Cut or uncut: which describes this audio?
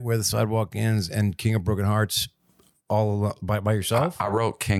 uncut